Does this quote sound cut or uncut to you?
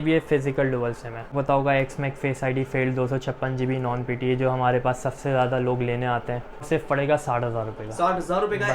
cut